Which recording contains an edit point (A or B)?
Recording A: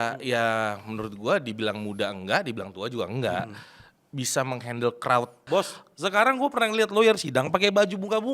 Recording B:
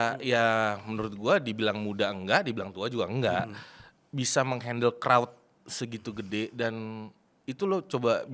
A